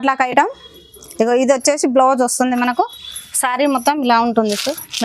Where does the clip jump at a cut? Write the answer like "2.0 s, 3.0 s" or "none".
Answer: none